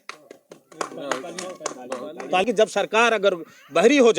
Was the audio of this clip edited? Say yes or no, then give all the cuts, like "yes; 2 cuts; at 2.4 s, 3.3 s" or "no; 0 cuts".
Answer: yes; 1 cut; at 2.4 s